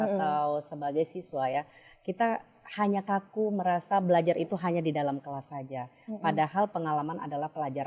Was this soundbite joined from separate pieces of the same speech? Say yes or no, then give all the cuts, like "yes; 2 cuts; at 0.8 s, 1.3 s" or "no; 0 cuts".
no; 0 cuts